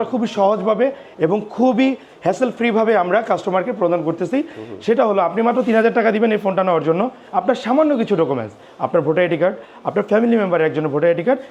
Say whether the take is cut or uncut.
uncut